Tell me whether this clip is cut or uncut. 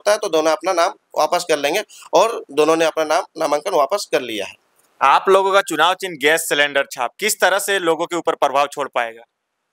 uncut